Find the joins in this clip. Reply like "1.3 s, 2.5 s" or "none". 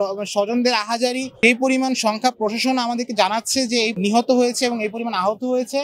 1.3 s, 3.9 s